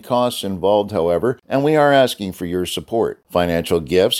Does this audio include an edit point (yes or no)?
yes